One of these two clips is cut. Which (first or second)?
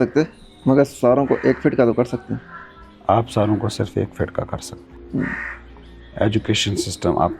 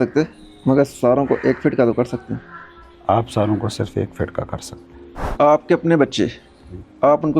second